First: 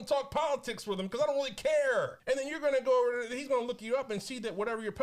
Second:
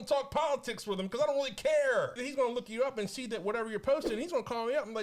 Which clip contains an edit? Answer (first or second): second